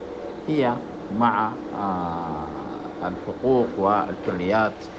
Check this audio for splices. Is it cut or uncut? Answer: uncut